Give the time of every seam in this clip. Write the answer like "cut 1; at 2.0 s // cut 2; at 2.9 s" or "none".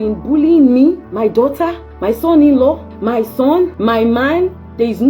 cut 1; at 1.1 s // cut 2; at 1.9 s // cut 3; at 2.9 s // cut 4; at 3.7 s